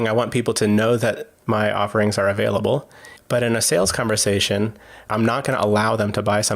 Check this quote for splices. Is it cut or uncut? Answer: cut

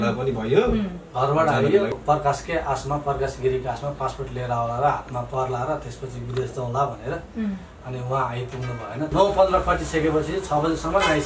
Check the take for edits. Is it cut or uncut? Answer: cut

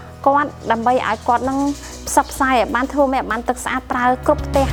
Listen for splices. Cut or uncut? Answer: uncut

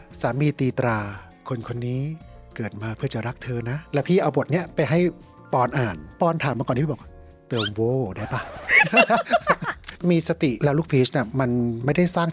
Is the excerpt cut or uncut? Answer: cut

